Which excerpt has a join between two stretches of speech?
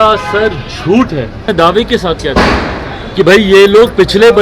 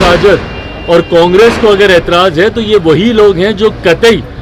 first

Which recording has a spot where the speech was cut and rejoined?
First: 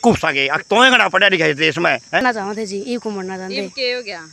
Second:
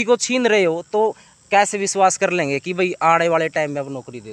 first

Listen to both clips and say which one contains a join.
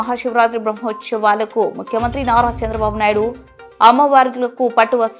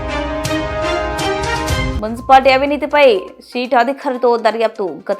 second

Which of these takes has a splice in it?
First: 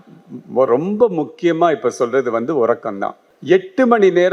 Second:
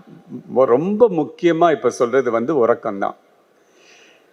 first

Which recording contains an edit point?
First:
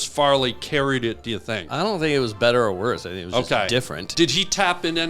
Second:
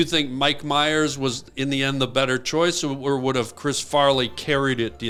first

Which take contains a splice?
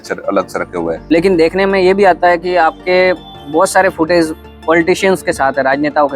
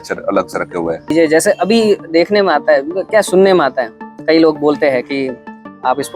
first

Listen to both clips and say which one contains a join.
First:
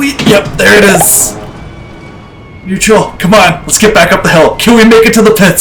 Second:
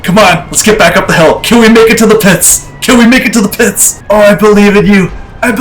second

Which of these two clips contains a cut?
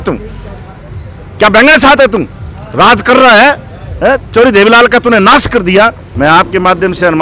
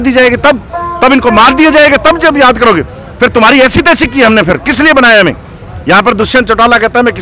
first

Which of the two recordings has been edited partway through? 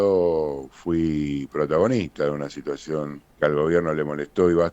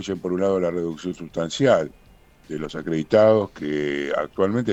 first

